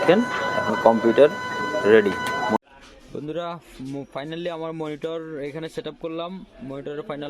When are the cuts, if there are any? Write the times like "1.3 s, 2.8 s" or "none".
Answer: 2.6 s